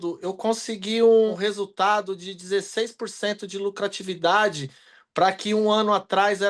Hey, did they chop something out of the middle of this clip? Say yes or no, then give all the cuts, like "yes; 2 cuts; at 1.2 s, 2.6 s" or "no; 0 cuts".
yes; 1 cut; at 1.3 s